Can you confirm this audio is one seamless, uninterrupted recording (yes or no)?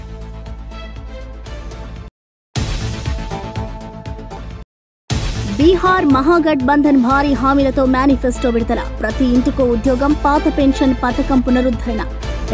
no